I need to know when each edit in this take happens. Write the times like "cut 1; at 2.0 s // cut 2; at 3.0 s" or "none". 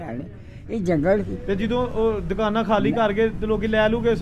cut 1; at 1.4 s